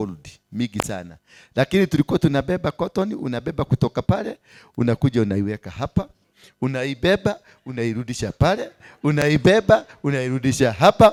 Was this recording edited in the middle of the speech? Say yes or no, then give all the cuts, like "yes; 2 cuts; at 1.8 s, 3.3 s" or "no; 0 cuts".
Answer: no; 0 cuts